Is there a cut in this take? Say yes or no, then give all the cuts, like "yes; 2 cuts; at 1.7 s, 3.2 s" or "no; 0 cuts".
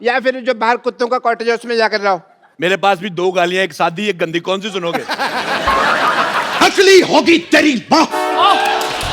yes; 1 cut; at 6.6 s